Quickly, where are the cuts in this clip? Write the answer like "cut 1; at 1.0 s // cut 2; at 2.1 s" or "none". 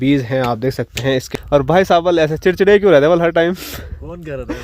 cut 1; at 1.3 s

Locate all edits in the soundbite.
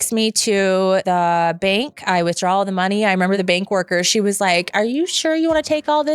cut 1; at 1.0 s // cut 2; at 3.4 s

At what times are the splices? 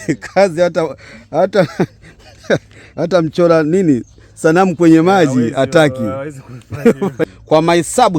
cut 1; at 7.2 s

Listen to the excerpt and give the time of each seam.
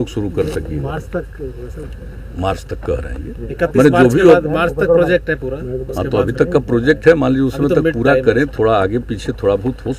none

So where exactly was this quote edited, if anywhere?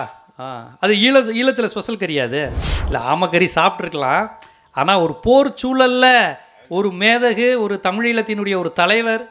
cut 1; at 2.7 s

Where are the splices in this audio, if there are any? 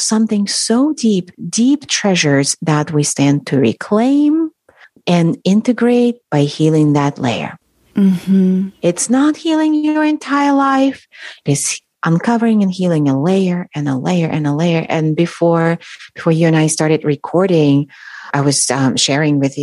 none

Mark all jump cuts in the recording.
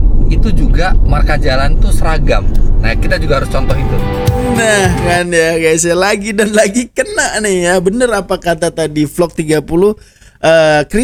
none

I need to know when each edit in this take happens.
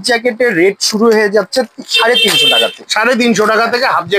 none

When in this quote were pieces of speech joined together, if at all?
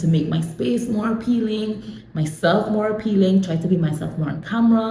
none

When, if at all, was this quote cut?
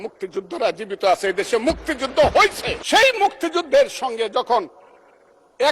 cut 1; at 2.7 s

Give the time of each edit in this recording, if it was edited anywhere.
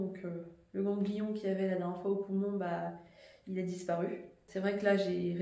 cut 1; at 4.4 s

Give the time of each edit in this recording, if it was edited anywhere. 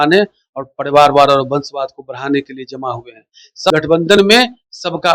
cut 1; at 3.7 s

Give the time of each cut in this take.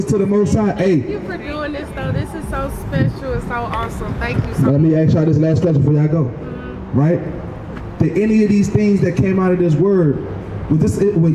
none

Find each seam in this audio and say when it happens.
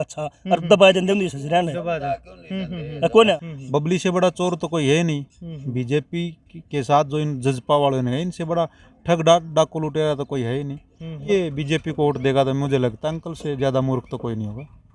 cut 1; at 3.5 s // cut 2; at 11.3 s

